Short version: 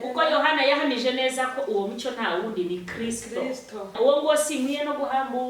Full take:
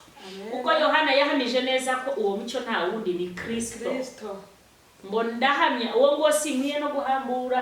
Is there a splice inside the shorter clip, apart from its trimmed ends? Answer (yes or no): yes